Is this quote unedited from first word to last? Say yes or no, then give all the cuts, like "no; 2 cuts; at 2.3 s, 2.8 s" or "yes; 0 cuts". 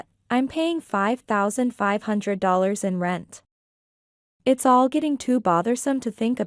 yes; 0 cuts